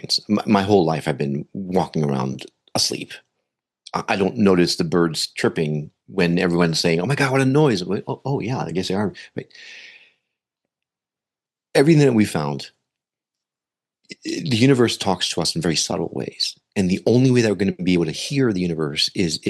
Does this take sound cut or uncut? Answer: uncut